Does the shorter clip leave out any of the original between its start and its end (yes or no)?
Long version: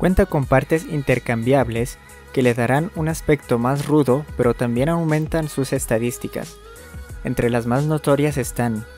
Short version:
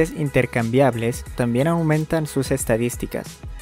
yes